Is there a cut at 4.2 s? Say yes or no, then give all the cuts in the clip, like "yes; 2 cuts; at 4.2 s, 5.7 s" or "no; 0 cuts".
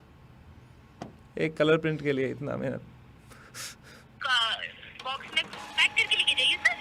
yes; 1 cut; at 4.2 s